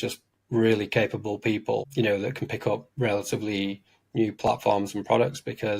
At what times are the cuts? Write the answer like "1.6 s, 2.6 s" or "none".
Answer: 1.9 s